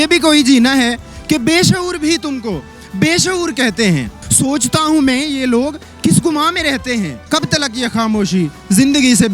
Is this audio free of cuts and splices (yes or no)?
no